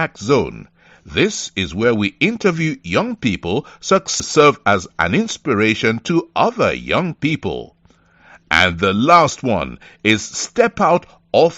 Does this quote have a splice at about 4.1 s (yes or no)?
yes